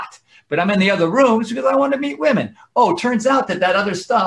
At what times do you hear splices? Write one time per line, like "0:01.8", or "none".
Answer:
none